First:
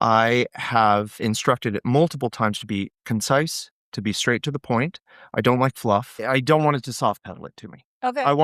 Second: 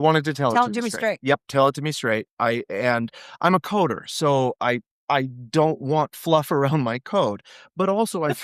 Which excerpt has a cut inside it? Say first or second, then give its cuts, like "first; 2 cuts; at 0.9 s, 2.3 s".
first; 1 cut; at 6.2 s